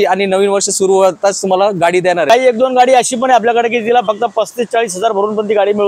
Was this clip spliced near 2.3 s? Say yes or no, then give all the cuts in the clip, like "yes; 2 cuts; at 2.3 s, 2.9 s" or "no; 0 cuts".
yes; 1 cut; at 2.3 s